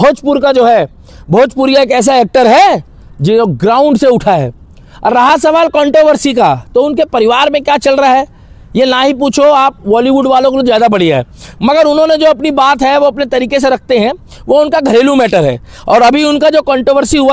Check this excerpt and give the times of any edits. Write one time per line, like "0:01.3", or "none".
none